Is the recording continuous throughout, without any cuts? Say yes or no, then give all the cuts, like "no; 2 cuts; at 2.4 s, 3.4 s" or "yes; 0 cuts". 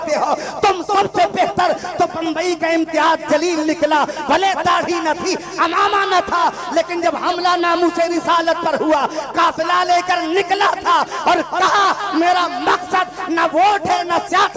yes; 0 cuts